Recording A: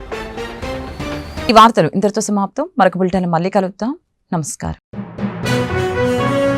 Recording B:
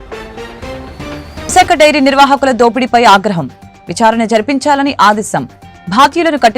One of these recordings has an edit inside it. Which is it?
B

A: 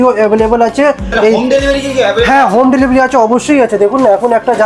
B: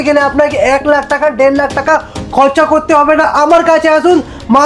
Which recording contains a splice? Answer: A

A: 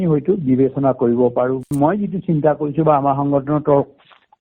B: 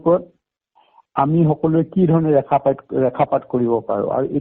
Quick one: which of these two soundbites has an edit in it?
A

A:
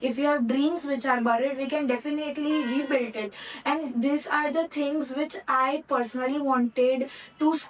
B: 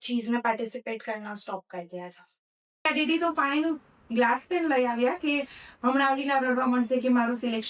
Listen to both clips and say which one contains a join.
B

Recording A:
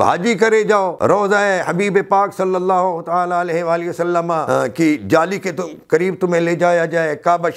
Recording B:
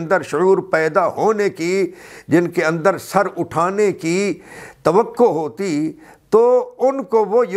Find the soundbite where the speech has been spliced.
A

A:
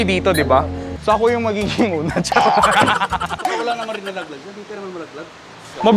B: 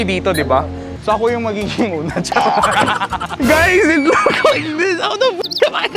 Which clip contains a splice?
B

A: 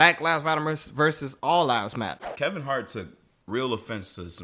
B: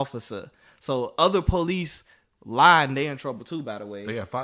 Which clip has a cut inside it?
A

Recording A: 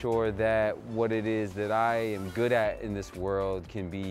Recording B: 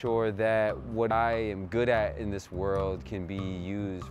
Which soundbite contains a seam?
B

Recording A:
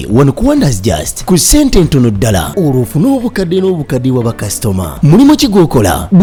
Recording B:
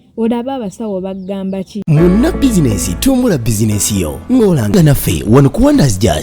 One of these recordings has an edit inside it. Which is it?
B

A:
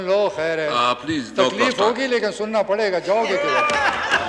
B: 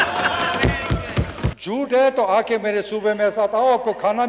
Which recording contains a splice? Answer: B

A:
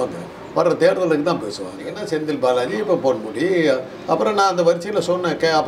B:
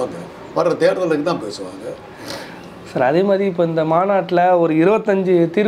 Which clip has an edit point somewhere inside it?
A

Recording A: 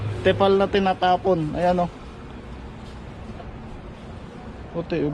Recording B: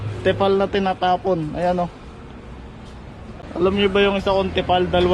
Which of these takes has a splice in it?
B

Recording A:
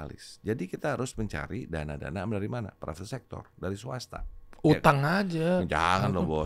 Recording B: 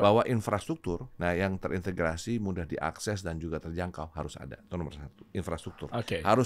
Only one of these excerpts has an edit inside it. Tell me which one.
B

